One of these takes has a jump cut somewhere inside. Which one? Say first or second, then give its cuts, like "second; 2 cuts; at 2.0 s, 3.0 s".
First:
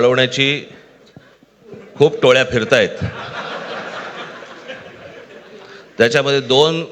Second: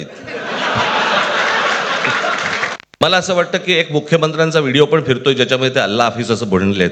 second; 1 cut; at 2.9 s